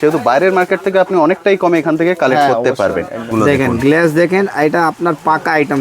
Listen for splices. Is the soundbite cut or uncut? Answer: cut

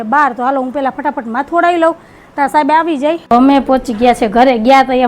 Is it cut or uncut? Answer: cut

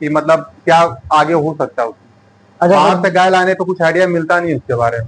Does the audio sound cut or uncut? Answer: uncut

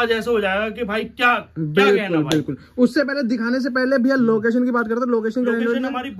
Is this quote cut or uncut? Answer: uncut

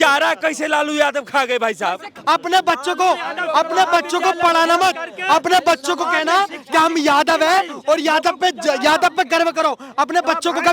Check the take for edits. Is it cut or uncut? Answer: cut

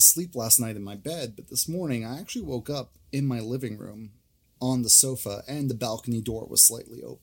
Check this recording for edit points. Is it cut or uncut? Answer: uncut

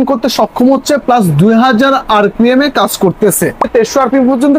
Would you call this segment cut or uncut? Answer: cut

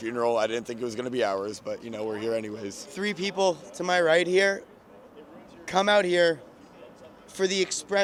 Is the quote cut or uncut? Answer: uncut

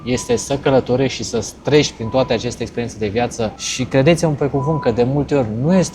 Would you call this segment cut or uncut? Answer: cut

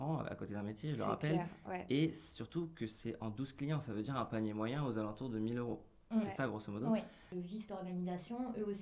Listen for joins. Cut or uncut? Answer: cut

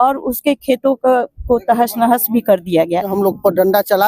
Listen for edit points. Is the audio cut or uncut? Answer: cut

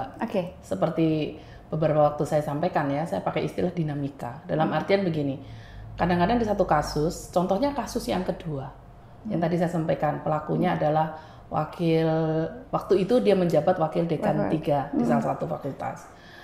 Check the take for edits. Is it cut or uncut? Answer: uncut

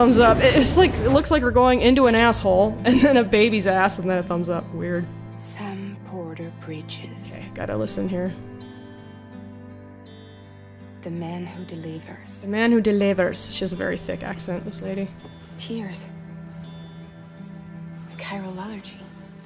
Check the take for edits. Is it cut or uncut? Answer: uncut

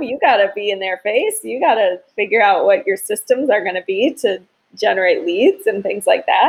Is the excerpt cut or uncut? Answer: uncut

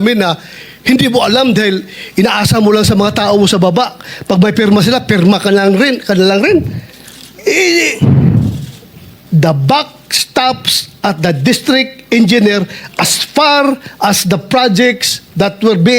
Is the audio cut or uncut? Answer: uncut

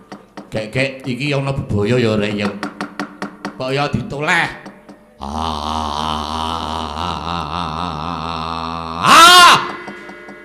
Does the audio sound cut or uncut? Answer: uncut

